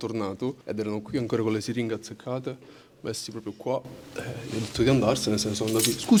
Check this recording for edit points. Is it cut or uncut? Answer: uncut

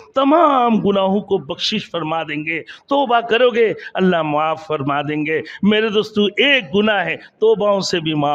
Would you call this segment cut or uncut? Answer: uncut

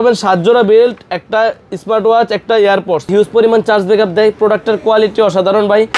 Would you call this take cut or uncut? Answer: cut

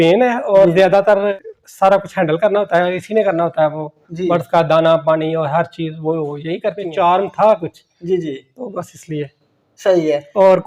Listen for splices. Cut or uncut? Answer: cut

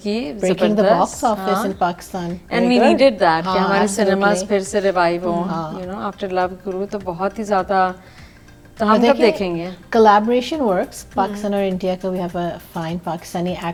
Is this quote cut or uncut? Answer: uncut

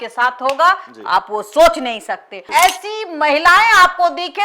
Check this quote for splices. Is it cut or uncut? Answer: cut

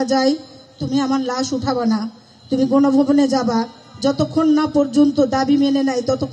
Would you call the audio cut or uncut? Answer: uncut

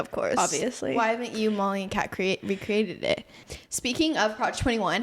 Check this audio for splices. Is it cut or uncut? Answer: cut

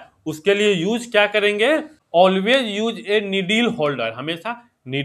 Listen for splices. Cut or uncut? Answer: cut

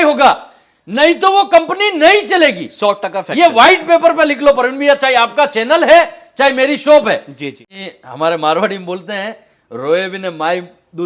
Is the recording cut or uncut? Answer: cut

